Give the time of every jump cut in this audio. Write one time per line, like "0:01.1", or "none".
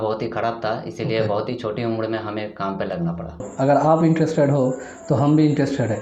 0:03.5

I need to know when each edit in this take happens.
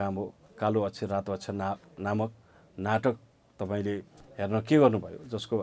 none

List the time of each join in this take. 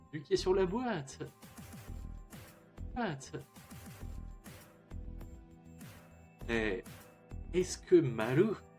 0:03.0

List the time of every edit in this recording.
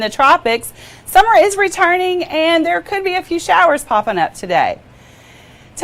none

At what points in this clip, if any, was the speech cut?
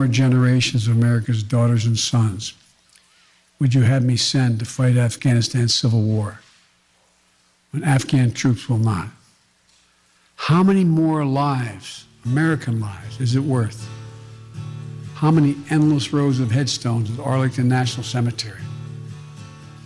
0:05.2

